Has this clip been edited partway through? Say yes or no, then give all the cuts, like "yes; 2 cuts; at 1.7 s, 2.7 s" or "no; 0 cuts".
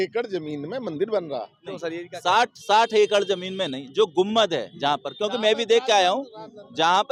no; 0 cuts